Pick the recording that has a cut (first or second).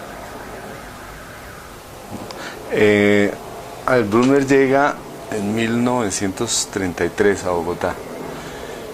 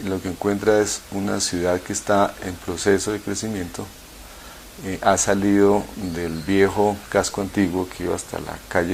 first